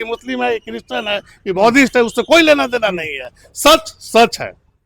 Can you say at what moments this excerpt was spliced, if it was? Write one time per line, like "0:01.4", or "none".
none